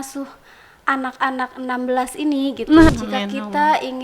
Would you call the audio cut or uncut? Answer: cut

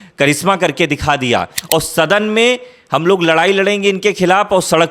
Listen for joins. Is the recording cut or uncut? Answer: cut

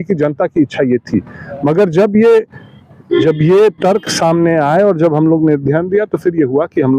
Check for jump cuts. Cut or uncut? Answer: uncut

